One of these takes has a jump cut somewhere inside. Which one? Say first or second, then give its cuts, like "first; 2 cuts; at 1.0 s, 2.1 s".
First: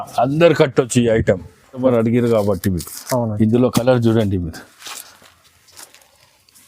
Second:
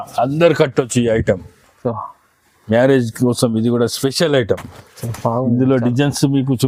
first; 1 cut; at 1.8 s